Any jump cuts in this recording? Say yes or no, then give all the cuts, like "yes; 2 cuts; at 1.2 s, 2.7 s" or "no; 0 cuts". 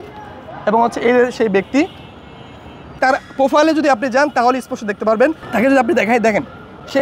no; 0 cuts